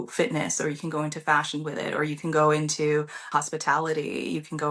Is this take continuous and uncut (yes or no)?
no